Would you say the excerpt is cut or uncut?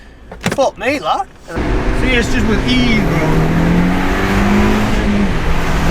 cut